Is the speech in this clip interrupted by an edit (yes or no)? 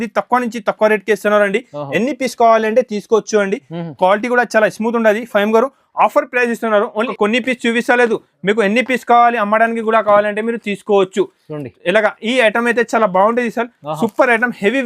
yes